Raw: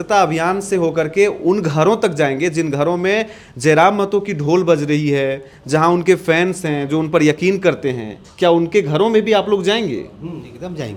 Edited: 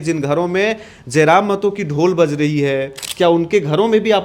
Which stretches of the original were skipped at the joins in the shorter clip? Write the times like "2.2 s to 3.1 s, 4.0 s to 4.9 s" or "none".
5.5 s to 8.2 s